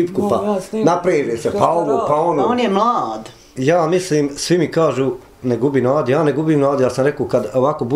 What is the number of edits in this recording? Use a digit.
1